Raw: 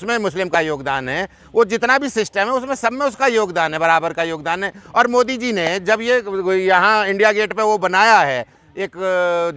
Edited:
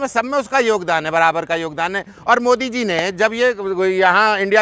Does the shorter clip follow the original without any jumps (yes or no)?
yes